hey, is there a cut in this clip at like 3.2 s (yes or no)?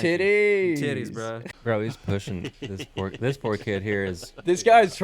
no